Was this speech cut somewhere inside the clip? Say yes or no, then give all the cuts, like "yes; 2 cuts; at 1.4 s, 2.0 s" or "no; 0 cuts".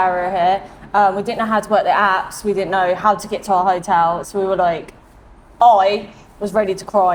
no; 0 cuts